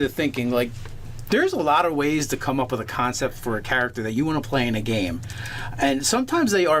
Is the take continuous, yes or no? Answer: no